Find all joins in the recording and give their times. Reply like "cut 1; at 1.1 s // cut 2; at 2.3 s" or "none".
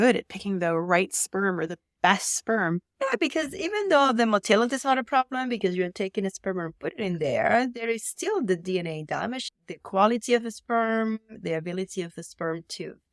cut 1; at 11.4 s